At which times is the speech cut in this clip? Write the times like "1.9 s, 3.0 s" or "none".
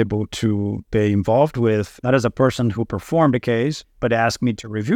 1.9 s, 3.9 s